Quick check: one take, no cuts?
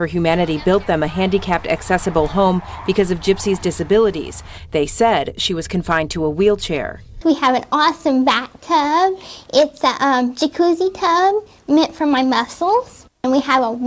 yes; 0 cuts

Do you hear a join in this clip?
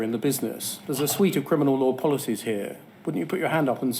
no; 0 cuts

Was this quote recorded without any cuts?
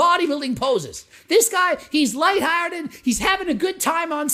yes; 0 cuts

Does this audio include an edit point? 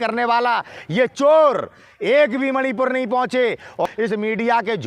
yes; 1 cut; at 3.9 s

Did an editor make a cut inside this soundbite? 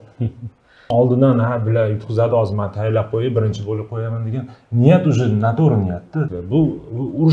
yes; 2 cuts; at 0.9 s, 6.4 s

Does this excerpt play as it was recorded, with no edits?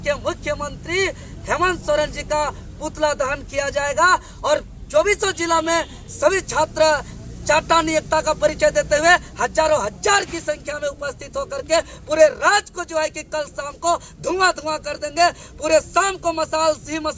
yes; 0 cuts

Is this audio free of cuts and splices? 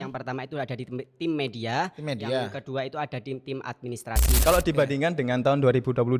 no; 1 cut; at 4.4 s

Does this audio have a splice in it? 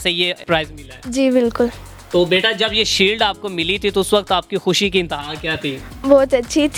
no; 0 cuts

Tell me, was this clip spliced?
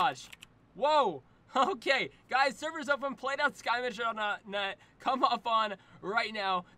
no; 0 cuts

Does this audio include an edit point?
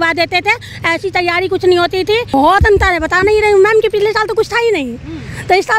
yes; 1 cut; at 2.3 s

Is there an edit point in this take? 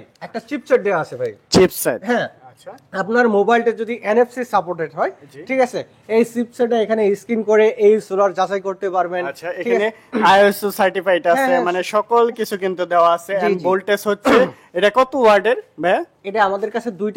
no; 0 cuts

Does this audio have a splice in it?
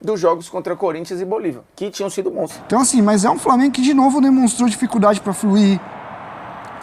yes; 1 cut; at 2.6 s

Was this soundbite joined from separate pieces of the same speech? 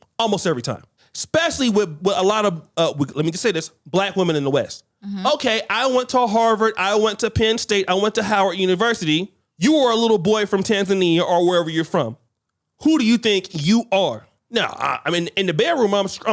no; 0 cuts

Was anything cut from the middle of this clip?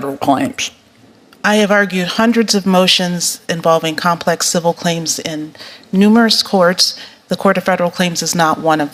no; 0 cuts

